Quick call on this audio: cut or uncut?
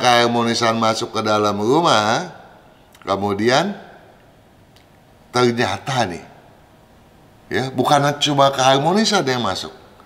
uncut